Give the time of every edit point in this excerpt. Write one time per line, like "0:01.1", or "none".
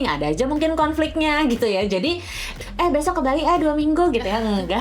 0:02.5